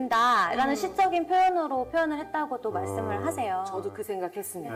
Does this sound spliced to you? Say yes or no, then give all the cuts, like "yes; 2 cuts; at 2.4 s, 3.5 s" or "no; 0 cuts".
no; 0 cuts